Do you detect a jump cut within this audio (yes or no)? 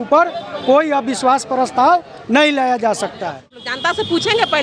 yes